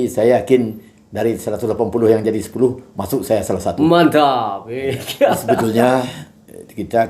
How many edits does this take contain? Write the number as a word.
one